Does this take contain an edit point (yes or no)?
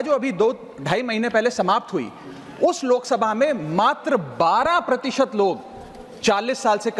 no